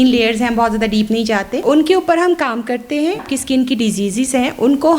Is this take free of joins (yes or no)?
no